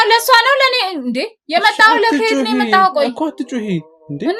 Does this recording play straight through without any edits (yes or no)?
yes